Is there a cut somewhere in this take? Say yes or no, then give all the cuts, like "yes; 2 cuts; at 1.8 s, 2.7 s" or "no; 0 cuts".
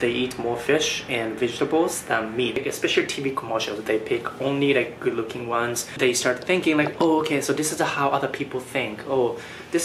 yes; 2 cuts; at 2.6 s, 5.9 s